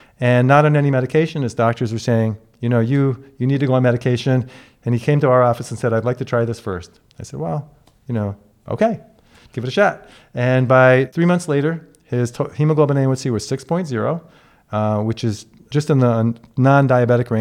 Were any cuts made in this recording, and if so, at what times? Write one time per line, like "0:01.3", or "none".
0:11.1
0:15.7